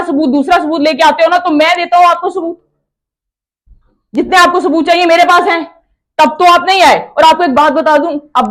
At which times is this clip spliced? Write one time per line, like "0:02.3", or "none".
none